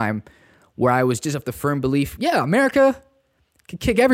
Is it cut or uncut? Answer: cut